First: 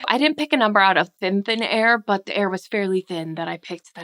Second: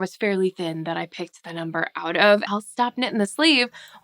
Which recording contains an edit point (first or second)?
second